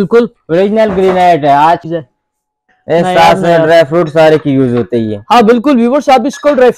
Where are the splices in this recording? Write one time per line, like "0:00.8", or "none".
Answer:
0:01.8